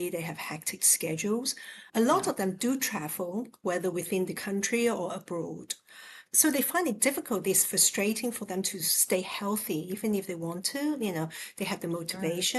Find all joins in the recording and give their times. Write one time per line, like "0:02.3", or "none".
0:06.3